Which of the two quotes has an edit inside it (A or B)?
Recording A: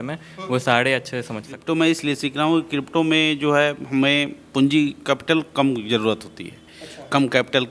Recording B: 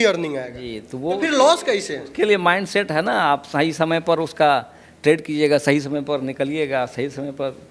A